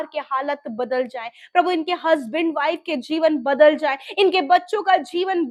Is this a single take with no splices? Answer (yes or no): yes